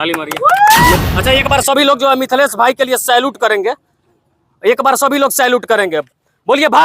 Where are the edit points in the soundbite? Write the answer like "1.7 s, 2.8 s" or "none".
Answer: 1.0 s